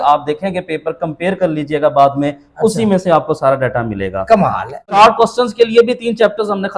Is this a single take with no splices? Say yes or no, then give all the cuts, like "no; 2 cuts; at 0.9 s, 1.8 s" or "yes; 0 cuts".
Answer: no; 1 cut; at 5.0 s